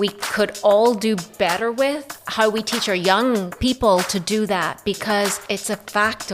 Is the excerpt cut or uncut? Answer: cut